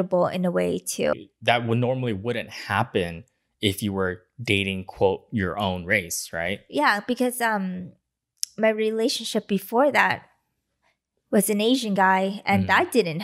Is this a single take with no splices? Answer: no; 1 cut; at 1.1 s

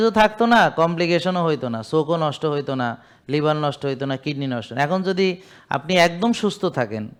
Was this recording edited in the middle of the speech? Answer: no; 0 cuts

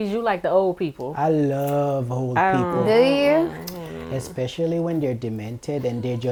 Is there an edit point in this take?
no; 0 cuts

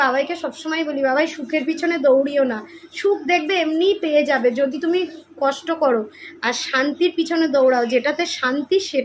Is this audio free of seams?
yes; 0 cuts

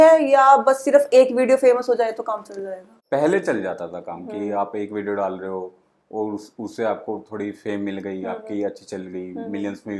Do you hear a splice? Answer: no; 0 cuts

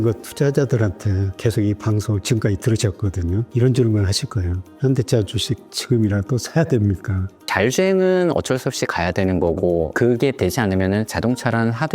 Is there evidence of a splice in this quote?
yes; 1 cut; at 7.4 s

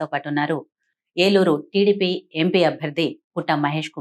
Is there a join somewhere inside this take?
no; 0 cuts

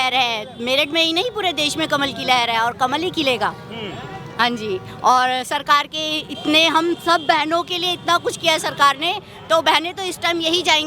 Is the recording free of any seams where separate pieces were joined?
yes; 0 cuts

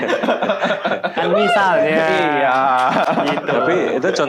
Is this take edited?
no; 0 cuts

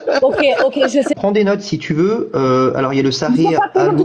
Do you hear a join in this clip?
yes; 1 cut; at 1.1 s

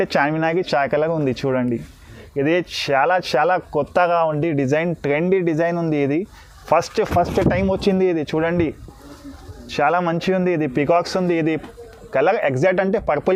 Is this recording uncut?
yes; 0 cuts

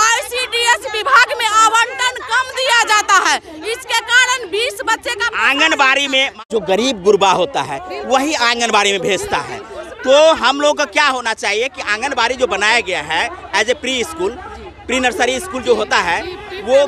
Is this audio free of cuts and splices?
yes; 0 cuts

